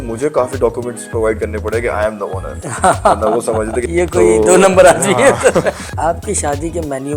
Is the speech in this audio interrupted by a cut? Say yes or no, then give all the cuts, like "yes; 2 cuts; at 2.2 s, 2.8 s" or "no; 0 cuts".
yes; 2 cuts; at 3.8 s, 5.9 s